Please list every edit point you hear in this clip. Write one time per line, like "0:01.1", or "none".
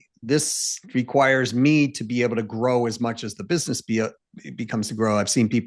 none